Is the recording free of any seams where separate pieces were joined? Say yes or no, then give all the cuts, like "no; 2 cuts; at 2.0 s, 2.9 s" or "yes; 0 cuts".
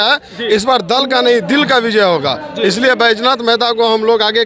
yes; 0 cuts